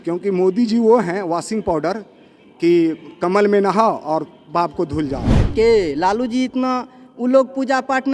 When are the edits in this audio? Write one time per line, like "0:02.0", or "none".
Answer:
0:05.4